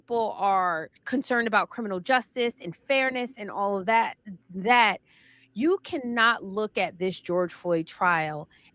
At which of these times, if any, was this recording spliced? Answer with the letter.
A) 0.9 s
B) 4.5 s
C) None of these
A